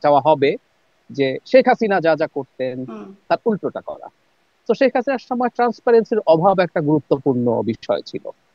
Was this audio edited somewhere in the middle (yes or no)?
no